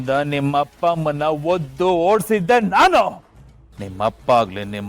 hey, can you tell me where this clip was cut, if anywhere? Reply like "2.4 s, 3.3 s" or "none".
3.2 s